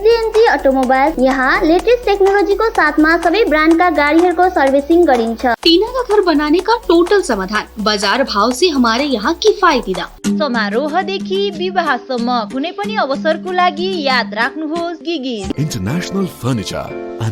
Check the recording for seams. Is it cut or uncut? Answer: cut